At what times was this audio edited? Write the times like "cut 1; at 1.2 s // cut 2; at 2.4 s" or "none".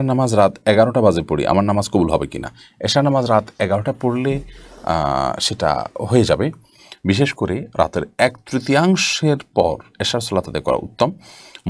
none